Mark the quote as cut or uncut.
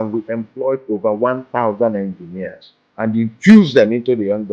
uncut